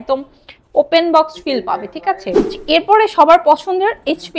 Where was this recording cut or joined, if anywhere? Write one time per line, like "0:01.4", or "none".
0:02.5

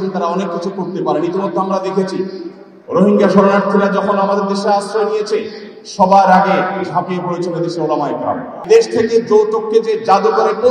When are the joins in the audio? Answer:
0:08.5

